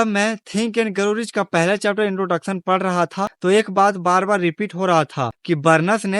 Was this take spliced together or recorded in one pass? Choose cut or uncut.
cut